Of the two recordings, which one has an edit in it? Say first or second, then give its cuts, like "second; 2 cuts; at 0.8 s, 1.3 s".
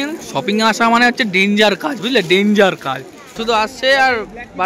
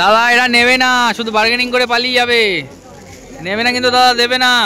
first; 1 cut; at 3.4 s